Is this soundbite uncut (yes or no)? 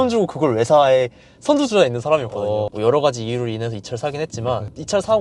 yes